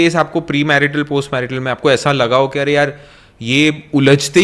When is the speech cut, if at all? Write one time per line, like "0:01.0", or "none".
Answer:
none